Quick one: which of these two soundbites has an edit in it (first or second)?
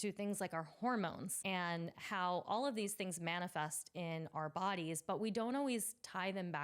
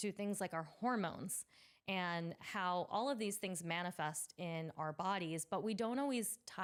first